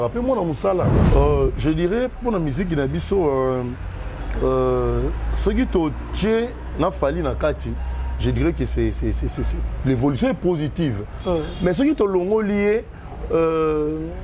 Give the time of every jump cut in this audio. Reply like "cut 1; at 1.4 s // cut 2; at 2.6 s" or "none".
cut 1; at 1.0 s